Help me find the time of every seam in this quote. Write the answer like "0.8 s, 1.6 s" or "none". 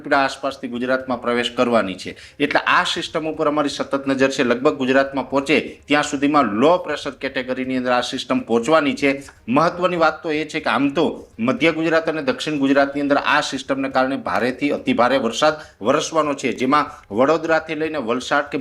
none

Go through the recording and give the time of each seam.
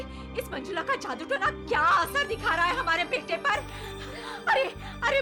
none

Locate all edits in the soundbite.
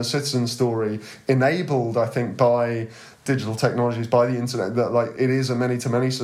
3.2 s, 5.1 s

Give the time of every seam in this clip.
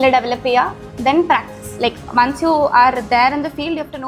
none

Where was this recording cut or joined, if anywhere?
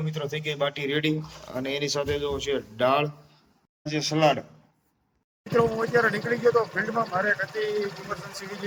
none

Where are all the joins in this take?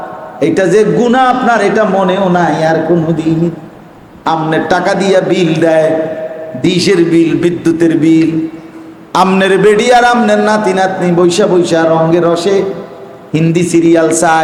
none

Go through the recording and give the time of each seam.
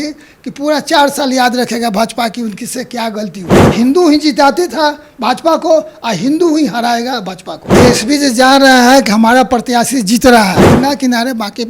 3.6 s, 7.7 s, 10.6 s

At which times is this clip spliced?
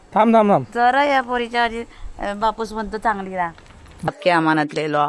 4.1 s

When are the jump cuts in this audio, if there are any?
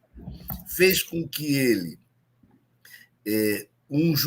none

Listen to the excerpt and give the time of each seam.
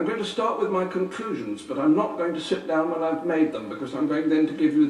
none

